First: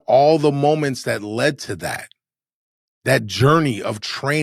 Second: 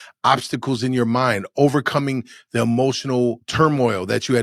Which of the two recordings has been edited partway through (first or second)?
second